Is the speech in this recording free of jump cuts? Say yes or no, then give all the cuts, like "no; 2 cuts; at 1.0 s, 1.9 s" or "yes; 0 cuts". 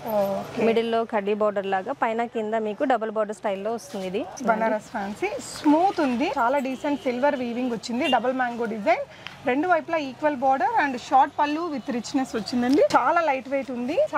no; 3 cuts; at 4.4 s, 6.3 s, 12.9 s